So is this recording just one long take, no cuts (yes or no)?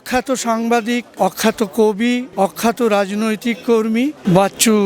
no